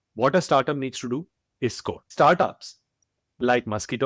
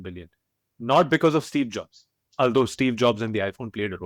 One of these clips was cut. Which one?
first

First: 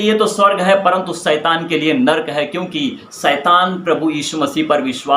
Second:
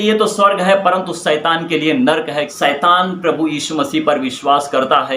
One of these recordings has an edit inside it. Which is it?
second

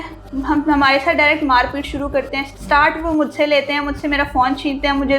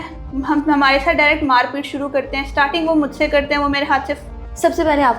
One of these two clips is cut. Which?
first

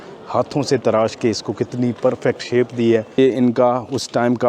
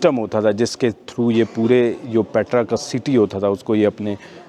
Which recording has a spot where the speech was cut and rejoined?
first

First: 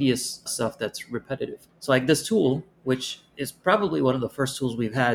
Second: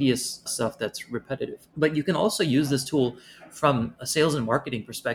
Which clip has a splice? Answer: first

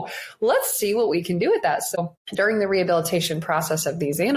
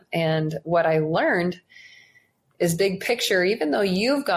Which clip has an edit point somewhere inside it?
first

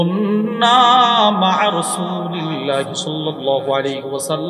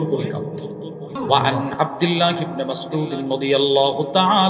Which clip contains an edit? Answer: second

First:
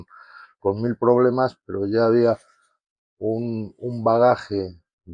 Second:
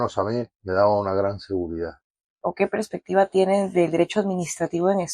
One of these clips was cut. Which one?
second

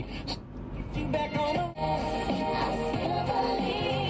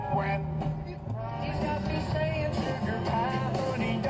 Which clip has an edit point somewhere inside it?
first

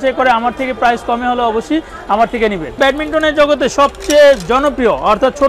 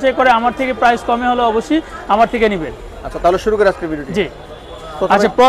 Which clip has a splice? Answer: first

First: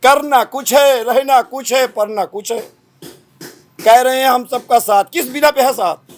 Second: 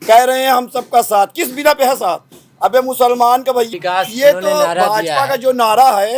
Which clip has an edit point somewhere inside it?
second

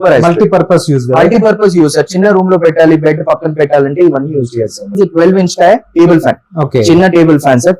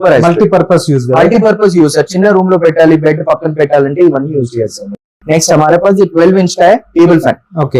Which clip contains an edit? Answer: first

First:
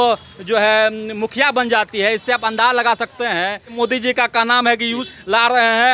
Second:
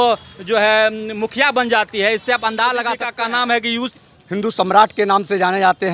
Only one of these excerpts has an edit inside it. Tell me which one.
second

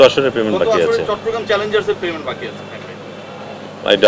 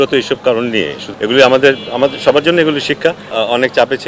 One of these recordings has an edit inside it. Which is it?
second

